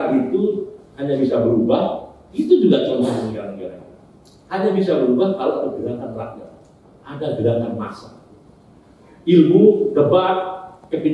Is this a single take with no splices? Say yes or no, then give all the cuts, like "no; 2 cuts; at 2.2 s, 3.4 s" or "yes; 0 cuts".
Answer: yes; 0 cuts